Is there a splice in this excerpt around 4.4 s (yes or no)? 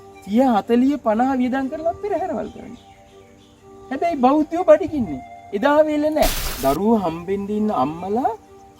no